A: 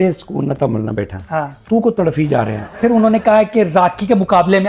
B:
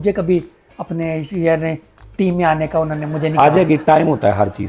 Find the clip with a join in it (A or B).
A